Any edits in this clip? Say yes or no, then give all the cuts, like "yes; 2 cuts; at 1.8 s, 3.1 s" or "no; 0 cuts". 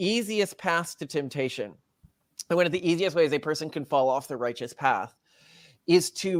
no; 0 cuts